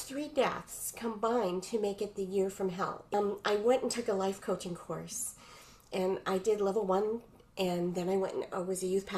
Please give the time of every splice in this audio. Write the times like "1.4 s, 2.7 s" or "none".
3.1 s

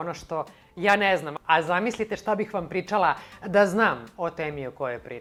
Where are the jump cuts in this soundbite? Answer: none

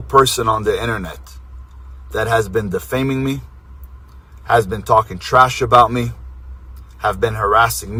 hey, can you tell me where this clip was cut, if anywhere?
none

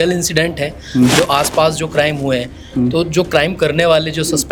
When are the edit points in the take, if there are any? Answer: none

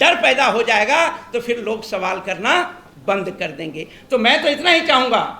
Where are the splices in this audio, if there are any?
none

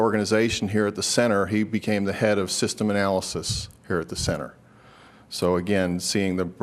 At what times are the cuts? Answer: none

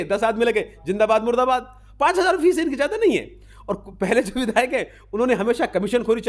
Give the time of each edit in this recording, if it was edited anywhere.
none

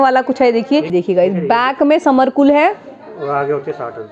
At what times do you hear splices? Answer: 0.9 s

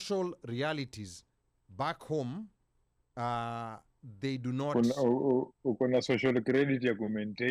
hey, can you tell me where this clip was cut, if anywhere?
none

